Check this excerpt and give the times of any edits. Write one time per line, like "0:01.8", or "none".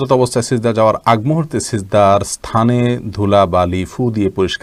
none

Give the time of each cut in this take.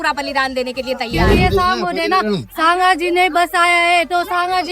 0:01.1

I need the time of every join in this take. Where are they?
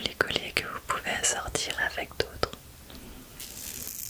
0:02.9

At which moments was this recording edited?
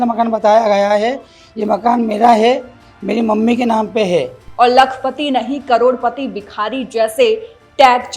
0:04.4

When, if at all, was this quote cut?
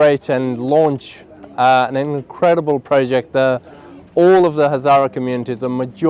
none

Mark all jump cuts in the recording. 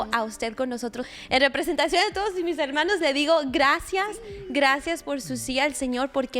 0:01.1

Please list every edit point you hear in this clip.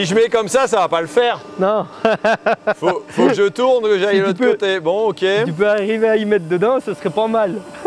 none

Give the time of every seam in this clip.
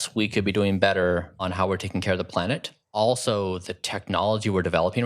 0:01.5
0:02.8

